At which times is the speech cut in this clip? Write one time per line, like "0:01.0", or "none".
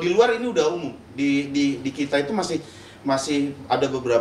none